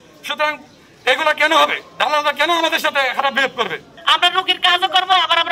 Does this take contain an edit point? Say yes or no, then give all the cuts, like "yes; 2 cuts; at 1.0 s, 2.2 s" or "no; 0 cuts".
yes; 1 cut; at 3.9 s